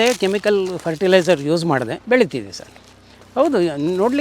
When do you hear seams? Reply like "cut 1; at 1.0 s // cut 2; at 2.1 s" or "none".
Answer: cut 1; at 2.0 s